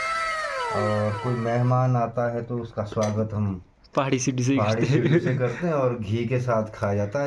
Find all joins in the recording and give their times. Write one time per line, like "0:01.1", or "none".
none